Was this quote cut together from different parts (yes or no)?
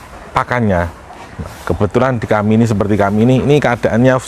no